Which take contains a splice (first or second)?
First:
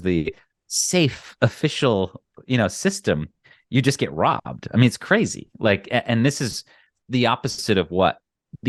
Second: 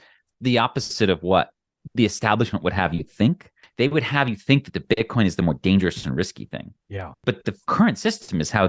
second